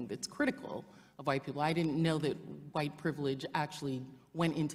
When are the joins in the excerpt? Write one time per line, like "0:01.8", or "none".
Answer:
none